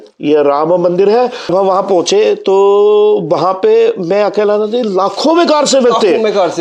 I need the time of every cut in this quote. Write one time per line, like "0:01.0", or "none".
0:01.5